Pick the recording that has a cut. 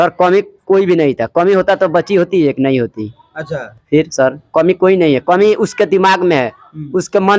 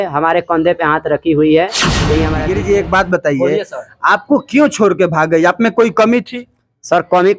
second; 1 cut; at 2.3 s

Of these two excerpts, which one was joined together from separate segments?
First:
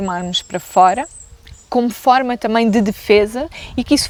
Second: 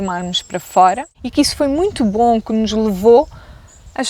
second; 1 cut; at 1.1 s

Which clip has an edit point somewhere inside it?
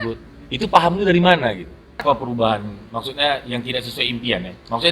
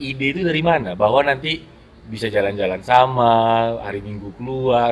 first; 1 cut; at 2.0 s

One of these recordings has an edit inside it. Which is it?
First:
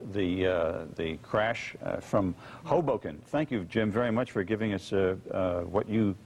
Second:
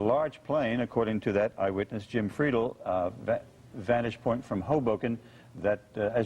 second; 1 cut; at 1.2 s

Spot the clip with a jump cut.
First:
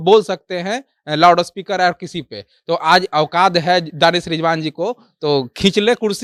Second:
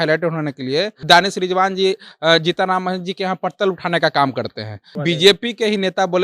second; 2 cuts; at 1.0 s, 5.0 s

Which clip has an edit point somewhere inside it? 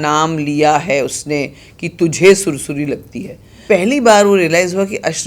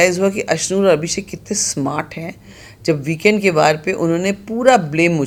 first; 1 cut; at 3.5 s

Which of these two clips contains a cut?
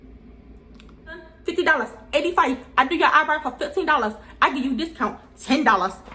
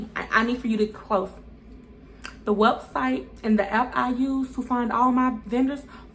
first; 1 cut; at 1.0 s

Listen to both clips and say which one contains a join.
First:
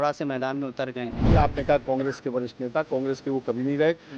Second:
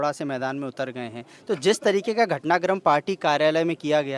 first; 1 cut; at 1.3 s

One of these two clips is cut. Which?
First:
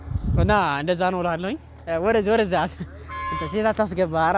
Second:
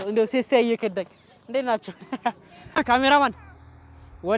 second; 1 cut; at 2.8 s

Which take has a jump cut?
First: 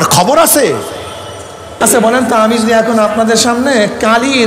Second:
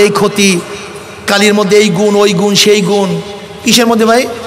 first; 1 cut; at 1.8 s

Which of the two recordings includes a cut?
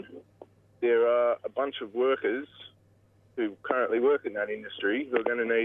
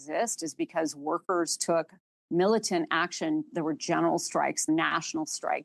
second; 1 cut; at 4.7 s

